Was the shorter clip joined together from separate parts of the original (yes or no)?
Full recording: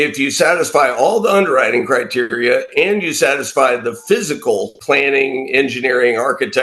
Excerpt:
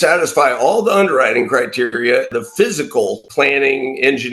yes